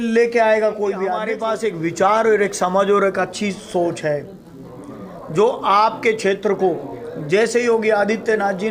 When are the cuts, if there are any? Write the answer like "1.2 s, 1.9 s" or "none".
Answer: 1.3 s